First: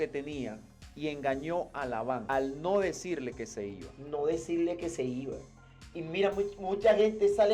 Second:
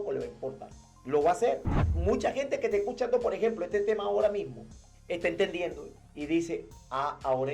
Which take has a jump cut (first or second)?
second